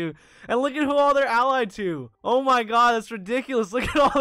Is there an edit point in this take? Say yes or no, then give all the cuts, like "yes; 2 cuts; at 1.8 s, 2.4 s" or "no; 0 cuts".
yes; 1 cut; at 2.1 s